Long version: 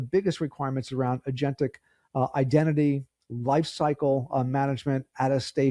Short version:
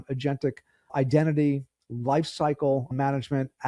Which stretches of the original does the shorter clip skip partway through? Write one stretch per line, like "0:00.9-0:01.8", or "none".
0:02.1-0:02.3
0:04.3-0:04.4